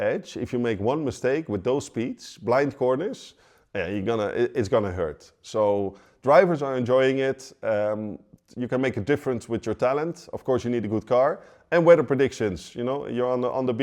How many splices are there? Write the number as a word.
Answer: zero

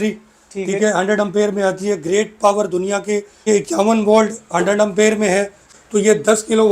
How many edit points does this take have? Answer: two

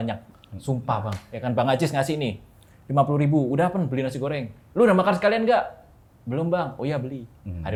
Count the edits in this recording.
zero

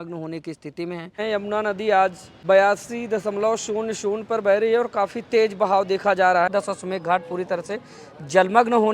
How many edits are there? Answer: three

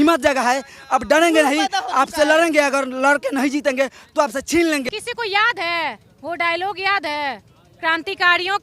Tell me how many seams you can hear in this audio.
one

